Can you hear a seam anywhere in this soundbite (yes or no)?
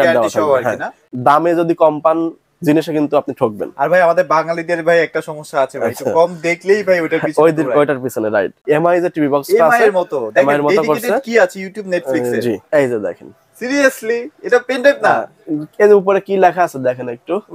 yes